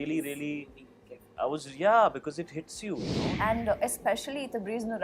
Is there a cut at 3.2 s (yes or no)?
yes